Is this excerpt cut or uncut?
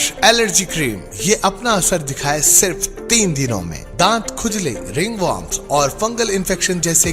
uncut